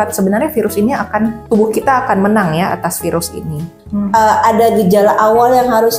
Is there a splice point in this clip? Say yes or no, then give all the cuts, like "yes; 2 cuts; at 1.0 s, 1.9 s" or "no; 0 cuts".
yes; 2 cuts; at 1.4 s, 3.7 s